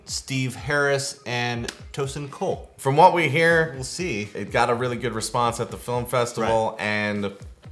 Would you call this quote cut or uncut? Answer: cut